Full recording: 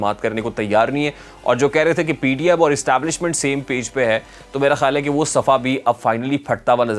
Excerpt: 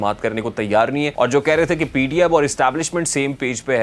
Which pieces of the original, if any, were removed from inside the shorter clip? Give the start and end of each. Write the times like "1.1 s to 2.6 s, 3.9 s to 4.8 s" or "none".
1.1 s to 1.4 s